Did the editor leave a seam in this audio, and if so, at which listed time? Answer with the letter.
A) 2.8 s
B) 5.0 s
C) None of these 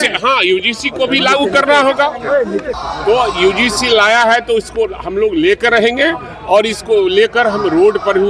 A